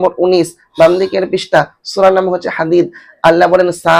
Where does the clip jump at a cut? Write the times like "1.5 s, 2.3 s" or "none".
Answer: none